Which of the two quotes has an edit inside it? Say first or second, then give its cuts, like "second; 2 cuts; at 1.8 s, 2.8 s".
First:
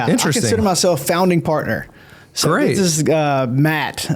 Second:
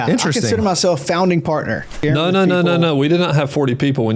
second; 1 cut; at 2.0 s